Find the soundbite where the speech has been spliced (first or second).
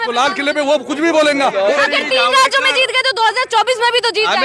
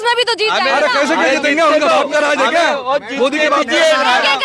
first